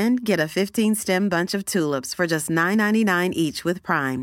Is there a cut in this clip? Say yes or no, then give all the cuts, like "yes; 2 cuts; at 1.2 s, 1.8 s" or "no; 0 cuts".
no; 0 cuts